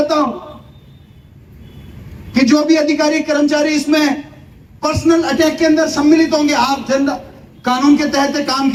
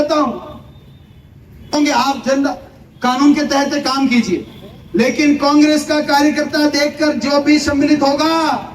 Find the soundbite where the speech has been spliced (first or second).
second